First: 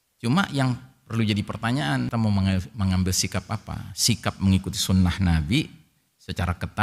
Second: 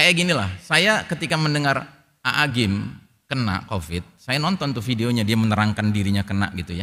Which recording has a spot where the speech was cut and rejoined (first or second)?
first